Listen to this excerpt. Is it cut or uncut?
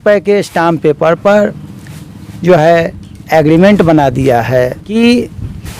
cut